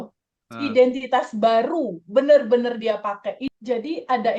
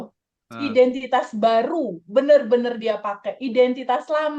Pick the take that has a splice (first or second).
first